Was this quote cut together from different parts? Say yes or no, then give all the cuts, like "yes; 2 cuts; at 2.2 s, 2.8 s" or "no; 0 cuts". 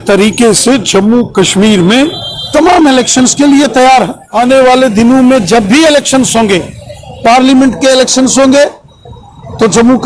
yes; 1 cut; at 4.2 s